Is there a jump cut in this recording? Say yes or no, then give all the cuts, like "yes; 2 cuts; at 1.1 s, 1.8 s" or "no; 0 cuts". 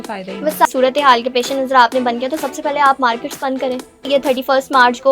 yes; 2 cuts; at 0.7 s, 4.0 s